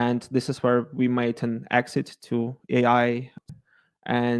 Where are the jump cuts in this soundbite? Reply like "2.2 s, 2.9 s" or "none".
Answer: 3.5 s